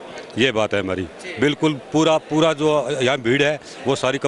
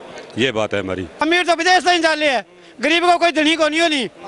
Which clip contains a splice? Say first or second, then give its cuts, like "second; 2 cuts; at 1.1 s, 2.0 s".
second; 1 cut; at 1.2 s